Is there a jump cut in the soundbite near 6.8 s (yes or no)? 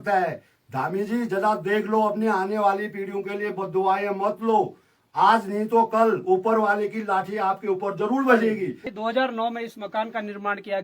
no